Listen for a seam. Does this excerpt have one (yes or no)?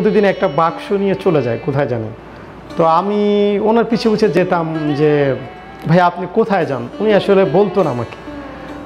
no